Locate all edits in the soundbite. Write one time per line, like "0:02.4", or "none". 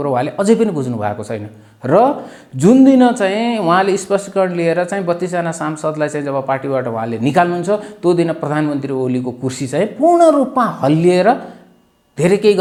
none